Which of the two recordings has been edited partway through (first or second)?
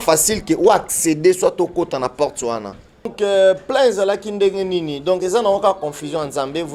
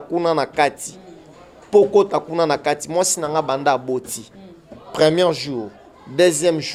first